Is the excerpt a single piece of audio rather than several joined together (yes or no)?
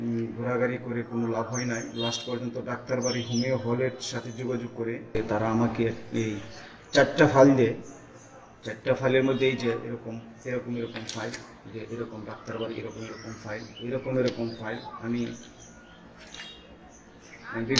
yes